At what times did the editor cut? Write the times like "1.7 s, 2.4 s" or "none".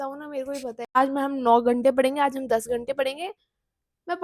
1.0 s